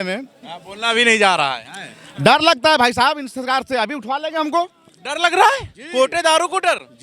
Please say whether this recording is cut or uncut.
uncut